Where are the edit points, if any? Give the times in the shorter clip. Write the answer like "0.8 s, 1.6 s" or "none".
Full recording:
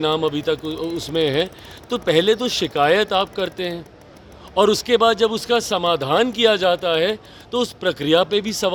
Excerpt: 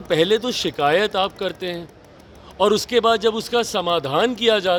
none